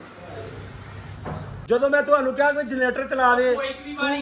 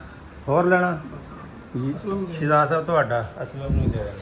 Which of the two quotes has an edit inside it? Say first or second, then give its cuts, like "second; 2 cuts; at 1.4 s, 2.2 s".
first; 1 cut; at 1.5 s